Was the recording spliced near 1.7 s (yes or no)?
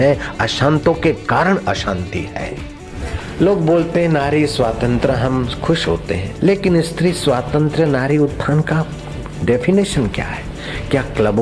no